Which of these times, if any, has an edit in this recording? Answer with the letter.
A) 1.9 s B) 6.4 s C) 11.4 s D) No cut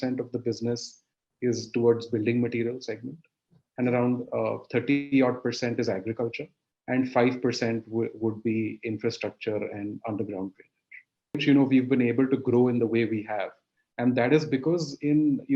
C